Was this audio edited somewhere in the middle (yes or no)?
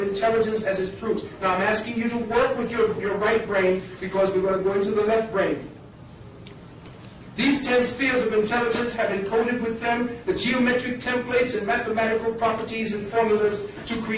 yes